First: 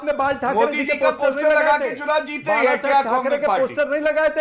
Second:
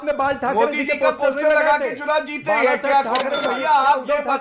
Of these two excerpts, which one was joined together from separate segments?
second; 1 cut; at 3.4 s

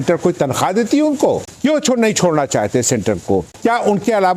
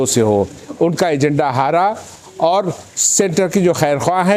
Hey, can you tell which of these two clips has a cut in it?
first; 2 cuts; at 1.5 s, 3.5 s

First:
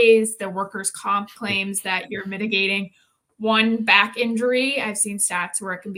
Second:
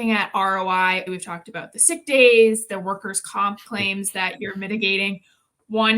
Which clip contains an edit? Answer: second; 1 cut; at 1.0 s

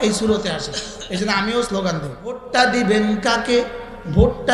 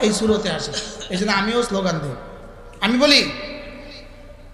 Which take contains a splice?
first; 1 cut; at 2.4 s

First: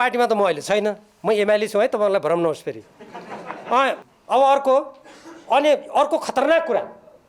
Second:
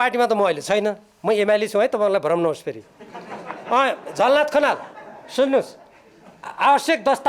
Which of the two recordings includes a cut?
first; 1 cut; at 4.0 s

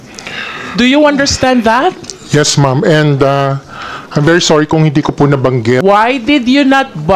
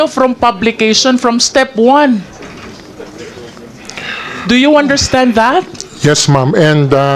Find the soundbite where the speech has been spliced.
first; 1 cut; at 5.8 s

